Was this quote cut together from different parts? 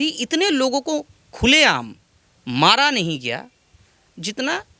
no; 0 cuts

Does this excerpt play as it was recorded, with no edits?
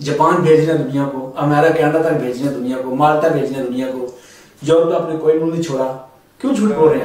yes; 0 cuts

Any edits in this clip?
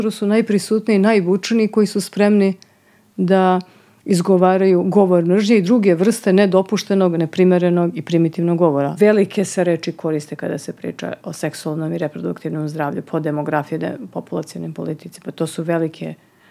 yes; 1 cut; at 8.9 s

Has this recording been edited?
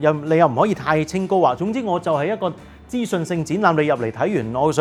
no; 0 cuts

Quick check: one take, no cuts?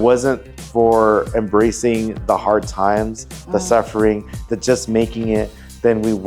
yes; 0 cuts

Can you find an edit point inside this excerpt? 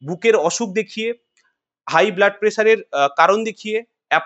no; 0 cuts

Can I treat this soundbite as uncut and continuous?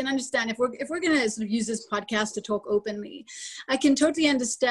yes; 0 cuts

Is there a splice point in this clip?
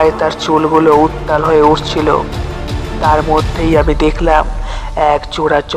yes; 1 cut; at 2.9 s

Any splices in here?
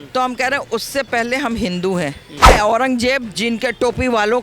yes; 1 cut; at 2.5 s

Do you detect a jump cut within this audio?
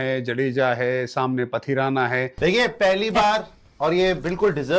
yes; 1 cut; at 2.3 s

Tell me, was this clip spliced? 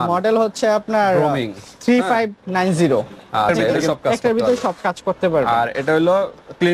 yes; 1 cut; at 3.7 s

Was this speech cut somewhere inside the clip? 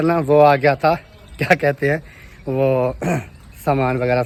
no; 0 cuts

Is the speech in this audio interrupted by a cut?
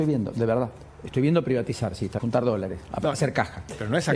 yes; 1 cut; at 2.1 s

